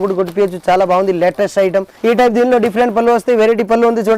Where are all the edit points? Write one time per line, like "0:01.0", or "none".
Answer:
0:01.9